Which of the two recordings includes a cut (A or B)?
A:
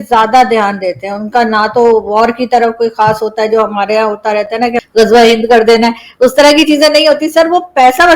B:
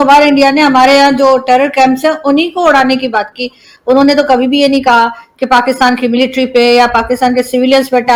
A